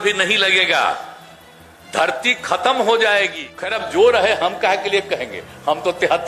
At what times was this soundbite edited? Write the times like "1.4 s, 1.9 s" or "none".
3.7 s